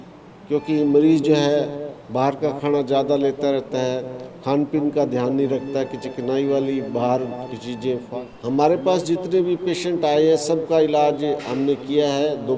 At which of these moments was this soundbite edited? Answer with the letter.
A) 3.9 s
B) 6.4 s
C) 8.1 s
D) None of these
C